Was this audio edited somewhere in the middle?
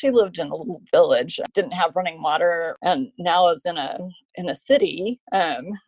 yes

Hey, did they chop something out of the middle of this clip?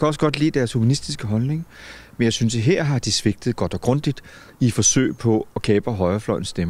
no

